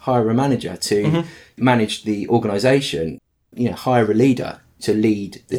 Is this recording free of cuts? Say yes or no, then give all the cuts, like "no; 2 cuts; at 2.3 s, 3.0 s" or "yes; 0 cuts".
yes; 0 cuts